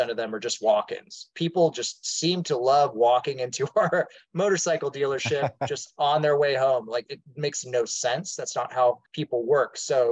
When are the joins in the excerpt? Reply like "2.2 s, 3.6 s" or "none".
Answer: 9.1 s